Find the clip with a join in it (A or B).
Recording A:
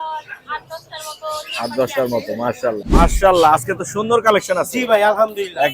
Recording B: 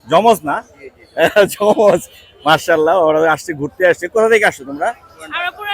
A